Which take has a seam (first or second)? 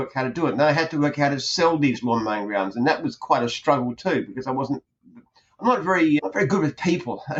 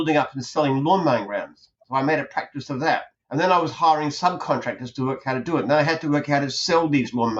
second